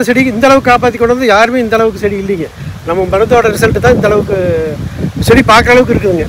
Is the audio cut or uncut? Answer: uncut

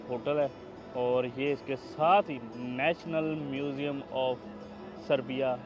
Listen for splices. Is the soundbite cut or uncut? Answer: uncut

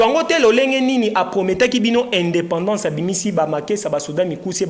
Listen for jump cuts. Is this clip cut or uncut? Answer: uncut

